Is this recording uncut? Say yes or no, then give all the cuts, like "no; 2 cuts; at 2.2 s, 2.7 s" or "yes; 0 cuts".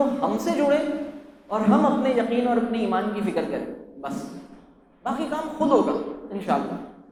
yes; 0 cuts